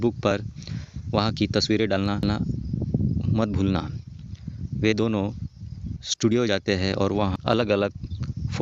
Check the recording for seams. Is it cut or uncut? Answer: uncut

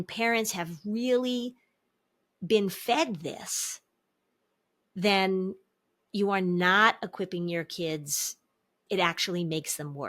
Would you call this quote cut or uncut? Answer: cut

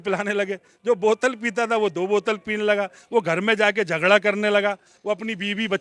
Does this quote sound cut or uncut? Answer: uncut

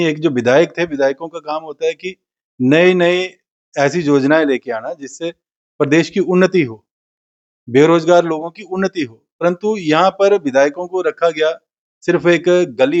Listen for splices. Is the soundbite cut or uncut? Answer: uncut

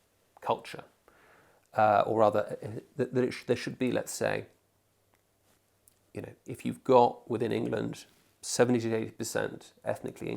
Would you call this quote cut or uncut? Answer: uncut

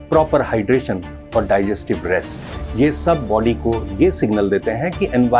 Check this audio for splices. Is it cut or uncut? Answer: uncut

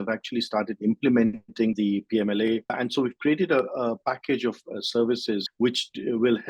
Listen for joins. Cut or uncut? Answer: cut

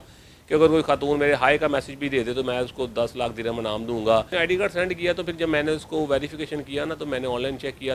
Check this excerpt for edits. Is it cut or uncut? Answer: cut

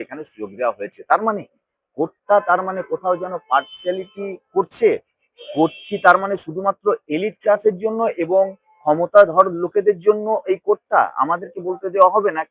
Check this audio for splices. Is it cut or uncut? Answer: uncut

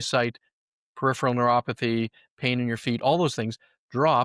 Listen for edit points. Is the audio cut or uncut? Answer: uncut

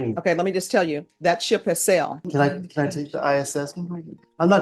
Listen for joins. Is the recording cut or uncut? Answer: cut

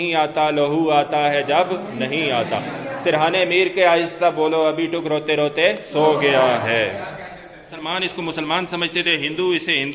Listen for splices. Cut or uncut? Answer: cut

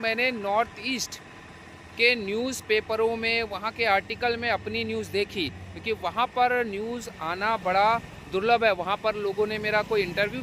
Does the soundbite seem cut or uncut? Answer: uncut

